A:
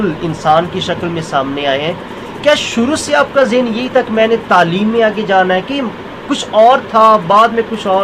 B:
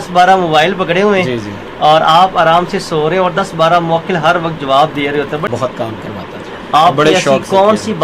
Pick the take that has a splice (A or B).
B